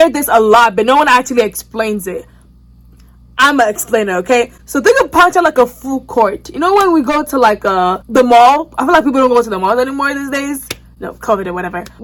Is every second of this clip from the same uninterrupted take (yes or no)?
yes